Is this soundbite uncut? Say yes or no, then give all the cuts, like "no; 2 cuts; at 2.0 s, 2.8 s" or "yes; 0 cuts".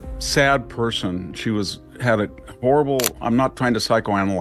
yes; 0 cuts